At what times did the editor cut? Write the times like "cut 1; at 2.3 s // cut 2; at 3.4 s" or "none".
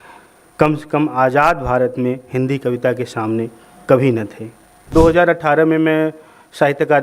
cut 1; at 4.9 s